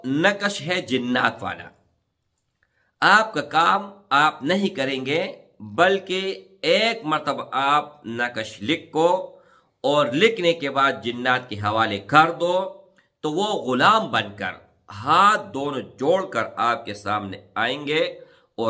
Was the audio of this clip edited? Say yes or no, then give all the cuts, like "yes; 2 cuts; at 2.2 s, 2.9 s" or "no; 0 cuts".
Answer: no; 0 cuts